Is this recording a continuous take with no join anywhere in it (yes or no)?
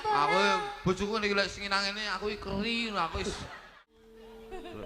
no